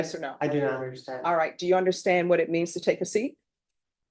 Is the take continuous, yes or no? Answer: yes